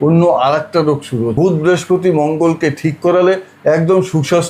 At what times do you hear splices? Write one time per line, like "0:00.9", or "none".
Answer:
0:01.3